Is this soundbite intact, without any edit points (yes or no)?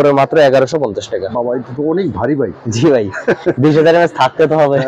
yes